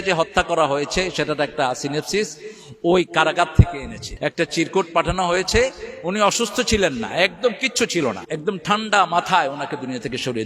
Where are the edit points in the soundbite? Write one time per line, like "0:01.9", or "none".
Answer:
0:04.0
0:08.2